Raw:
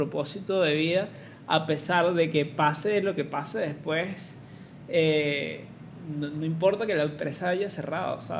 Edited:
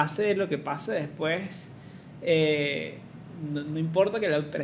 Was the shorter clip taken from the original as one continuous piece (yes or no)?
yes